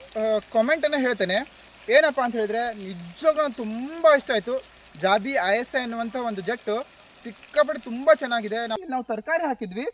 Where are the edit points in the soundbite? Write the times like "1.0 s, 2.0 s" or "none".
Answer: 8.8 s